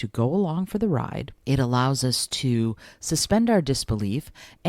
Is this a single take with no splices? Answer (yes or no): no